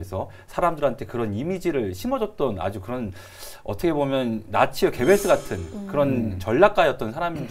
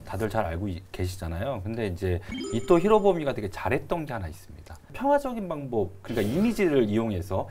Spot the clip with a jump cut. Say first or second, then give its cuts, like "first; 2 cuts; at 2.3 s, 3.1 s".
second; 1 cut; at 4.9 s